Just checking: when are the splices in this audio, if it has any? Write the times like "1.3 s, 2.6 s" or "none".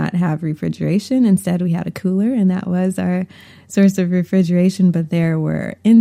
none